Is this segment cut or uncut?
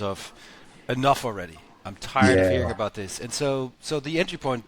uncut